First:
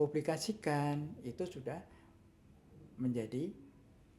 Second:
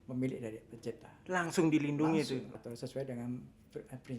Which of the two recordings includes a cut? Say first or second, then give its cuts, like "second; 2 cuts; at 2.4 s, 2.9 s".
second; 1 cut; at 2.5 s